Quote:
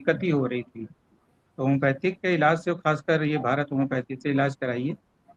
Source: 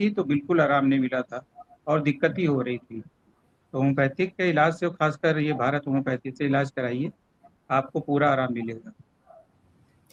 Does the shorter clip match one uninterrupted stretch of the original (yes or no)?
yes